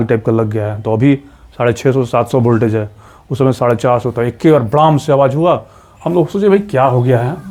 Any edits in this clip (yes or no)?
no